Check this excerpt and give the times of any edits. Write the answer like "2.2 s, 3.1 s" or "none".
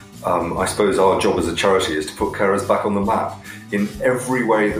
none